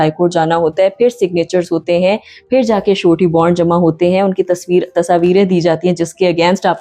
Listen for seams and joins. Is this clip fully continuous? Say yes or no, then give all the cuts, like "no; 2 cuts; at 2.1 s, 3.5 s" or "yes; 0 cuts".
yes; 0 cuts